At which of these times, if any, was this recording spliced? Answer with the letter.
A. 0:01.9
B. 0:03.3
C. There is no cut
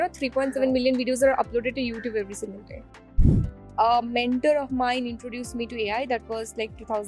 B